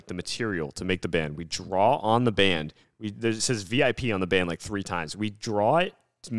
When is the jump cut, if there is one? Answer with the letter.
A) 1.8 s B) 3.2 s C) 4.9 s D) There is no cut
D